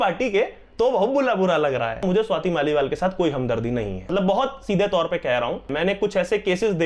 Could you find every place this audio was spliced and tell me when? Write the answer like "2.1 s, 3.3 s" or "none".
2.0 s, 4.1 s, 5.7 s